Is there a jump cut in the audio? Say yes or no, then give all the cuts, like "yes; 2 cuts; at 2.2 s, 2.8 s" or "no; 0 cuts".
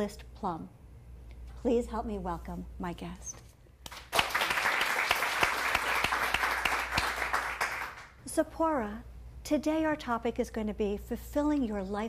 yes; 1 cut; at 1.5 s